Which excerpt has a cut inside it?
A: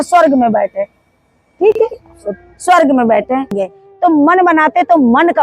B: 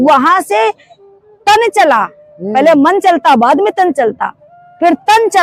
A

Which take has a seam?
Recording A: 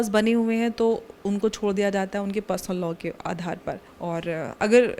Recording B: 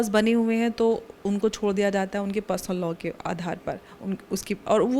A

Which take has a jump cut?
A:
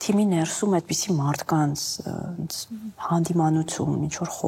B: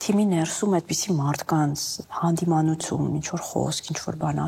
B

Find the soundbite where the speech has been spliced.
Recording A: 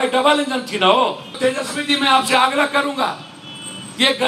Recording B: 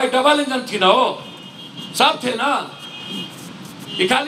A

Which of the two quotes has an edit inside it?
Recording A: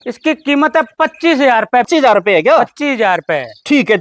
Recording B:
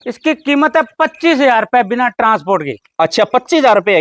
A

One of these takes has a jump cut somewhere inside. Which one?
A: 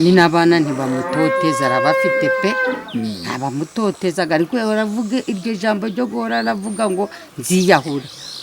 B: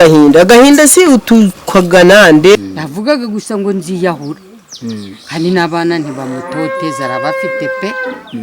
B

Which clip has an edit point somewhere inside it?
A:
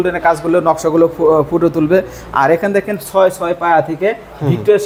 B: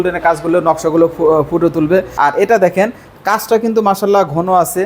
B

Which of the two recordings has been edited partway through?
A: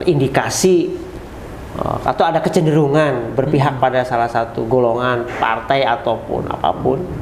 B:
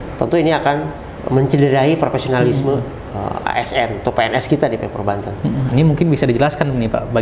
B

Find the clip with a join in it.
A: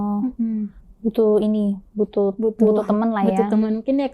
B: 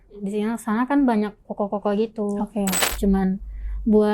B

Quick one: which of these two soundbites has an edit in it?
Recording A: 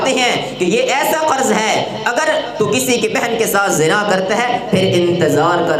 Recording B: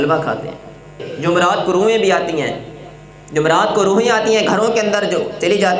B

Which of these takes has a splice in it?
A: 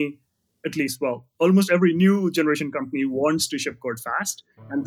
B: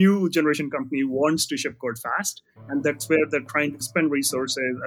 B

